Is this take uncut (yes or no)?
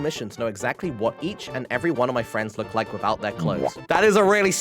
no